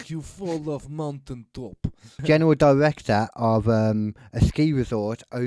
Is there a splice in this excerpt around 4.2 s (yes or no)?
no